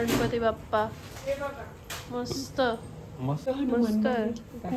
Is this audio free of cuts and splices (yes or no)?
no